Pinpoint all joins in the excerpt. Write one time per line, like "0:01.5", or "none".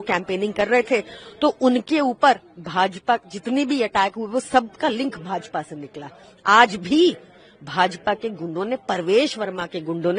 none